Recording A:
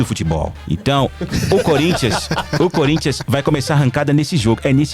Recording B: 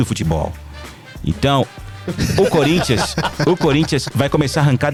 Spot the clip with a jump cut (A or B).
A